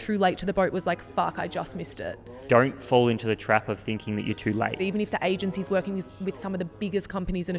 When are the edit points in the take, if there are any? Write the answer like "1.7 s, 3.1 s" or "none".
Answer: 2.4 s, 4.8 s